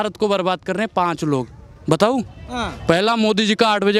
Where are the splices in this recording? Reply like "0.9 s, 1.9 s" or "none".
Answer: none